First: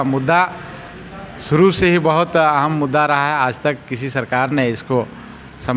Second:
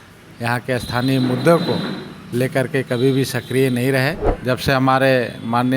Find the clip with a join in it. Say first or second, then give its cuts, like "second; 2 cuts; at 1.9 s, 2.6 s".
second; 1 cut; at 4.3 s